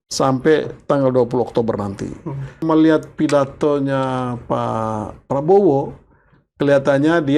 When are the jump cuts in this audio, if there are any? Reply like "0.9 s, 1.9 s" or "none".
2.6 s